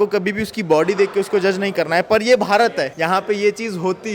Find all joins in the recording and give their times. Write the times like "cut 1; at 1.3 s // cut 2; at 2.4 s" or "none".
cut 1; at 2.9 s